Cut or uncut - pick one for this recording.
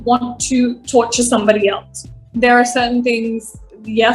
cut